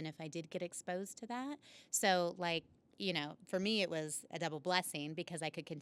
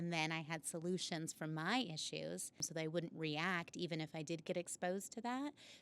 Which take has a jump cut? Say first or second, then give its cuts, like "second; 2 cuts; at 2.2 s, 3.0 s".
second; 1 cut; at 2.6 s